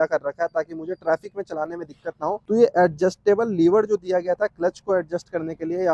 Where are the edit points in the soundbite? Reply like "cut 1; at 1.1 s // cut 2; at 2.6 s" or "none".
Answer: none